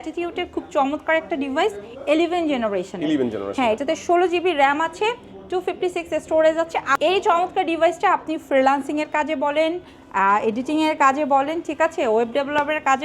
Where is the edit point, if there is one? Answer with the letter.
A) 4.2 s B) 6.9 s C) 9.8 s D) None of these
B